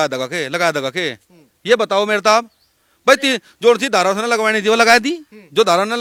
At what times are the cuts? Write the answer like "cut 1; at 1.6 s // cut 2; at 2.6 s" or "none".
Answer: none